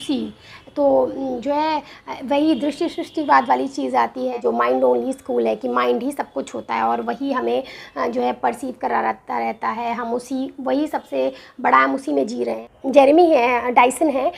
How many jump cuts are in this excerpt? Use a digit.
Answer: 2